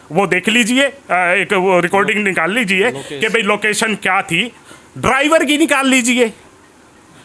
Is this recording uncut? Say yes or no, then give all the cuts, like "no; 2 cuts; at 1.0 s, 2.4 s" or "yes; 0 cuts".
yes; 0 cuts